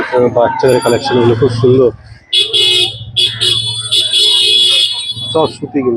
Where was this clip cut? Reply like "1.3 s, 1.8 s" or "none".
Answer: none